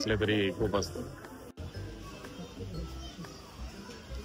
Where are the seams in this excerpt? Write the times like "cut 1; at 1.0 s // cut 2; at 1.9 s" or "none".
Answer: none